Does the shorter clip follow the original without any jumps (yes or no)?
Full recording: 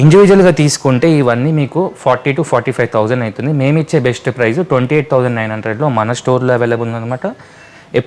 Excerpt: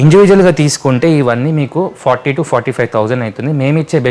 yes